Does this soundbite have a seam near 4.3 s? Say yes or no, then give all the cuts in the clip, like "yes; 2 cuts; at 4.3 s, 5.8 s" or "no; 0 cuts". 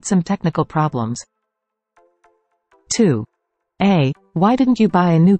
no; 2 cuts; at 1.3 s, 2.8 s